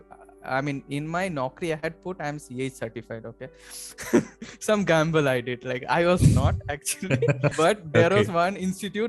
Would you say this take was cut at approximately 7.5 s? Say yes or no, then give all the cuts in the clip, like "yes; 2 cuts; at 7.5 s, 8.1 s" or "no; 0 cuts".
yes; 1 cut; at 7.5 s